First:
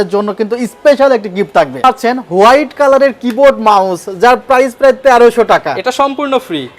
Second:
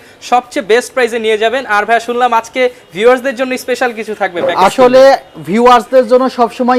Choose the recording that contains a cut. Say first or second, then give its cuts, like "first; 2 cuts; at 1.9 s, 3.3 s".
first; 1 cut; at 1.8 s